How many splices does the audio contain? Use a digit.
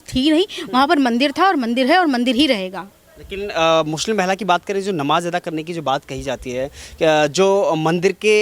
0